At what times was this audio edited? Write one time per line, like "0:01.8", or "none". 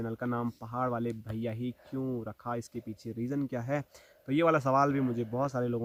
none